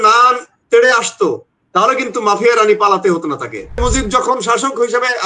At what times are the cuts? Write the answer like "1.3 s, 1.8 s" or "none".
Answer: 3.8 s